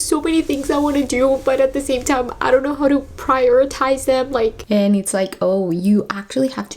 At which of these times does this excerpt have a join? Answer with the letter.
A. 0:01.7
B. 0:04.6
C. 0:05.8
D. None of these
B